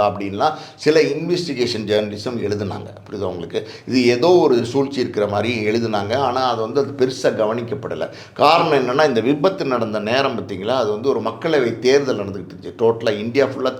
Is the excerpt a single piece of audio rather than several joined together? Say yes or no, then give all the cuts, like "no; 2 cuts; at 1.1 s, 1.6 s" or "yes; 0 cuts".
yes; 0 cuts